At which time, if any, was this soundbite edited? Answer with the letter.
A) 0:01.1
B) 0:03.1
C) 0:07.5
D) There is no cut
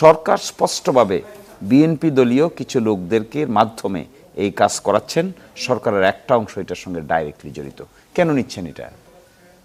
D